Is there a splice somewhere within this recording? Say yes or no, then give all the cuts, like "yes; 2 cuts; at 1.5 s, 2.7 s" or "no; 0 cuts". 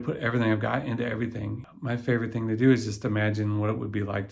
yes; 1 cut; at 1.6 s